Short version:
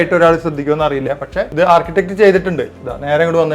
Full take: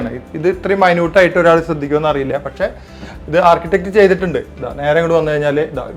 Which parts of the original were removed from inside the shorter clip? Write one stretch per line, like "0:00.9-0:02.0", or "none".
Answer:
0:02.7-0:03.2